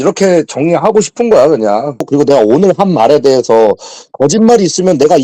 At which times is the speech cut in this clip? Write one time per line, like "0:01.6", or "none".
0:02.1

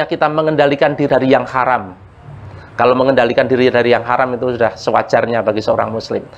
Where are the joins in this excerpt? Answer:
0:01.1

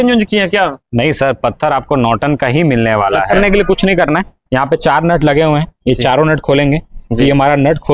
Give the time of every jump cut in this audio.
0:03.5

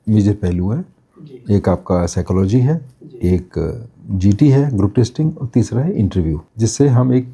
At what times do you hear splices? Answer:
0:06.4

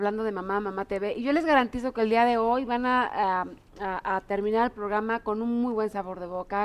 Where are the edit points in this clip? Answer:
0:05.0

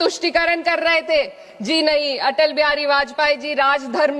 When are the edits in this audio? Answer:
none

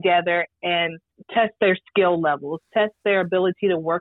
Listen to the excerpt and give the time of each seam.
none

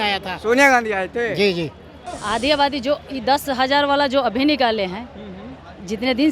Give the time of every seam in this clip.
0:02.0

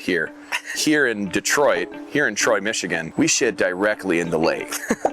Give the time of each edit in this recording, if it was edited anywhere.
0:03.0

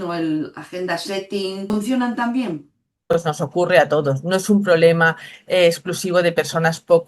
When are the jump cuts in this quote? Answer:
0:01.7
0:03.1

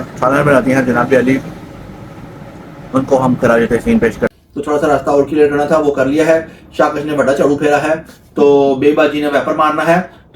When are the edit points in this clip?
0:04.3

